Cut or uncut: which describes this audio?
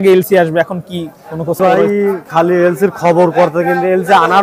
cut